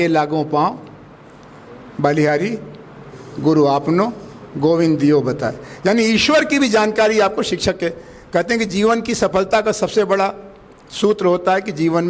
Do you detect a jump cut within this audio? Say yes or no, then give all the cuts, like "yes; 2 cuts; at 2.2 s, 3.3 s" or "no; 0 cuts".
no; 0 cuts